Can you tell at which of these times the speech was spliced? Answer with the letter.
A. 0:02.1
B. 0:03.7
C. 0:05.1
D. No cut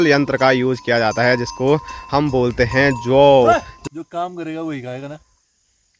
B